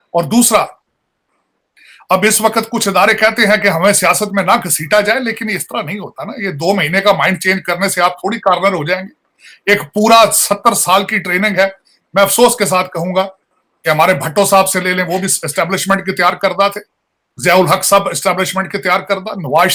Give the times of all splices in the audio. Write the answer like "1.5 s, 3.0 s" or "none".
none